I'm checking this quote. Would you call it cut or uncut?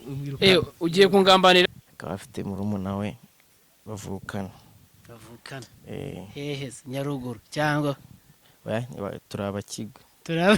cut